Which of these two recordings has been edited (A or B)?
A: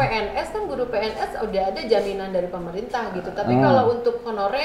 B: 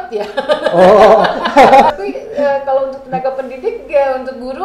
B